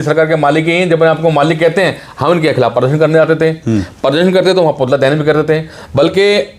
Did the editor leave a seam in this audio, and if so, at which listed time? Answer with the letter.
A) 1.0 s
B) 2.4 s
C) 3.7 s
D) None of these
D